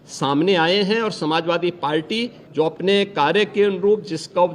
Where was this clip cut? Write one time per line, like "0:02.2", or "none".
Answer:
0:02.4